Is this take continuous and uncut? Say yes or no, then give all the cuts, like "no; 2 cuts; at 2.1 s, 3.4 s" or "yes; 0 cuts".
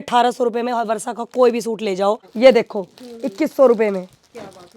no; 1 cut; at 2.3 s